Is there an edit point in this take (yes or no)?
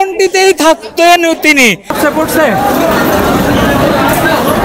yes